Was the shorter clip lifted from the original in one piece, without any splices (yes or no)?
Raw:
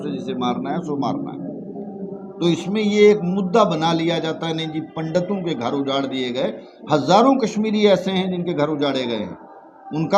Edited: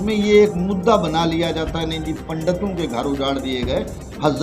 yes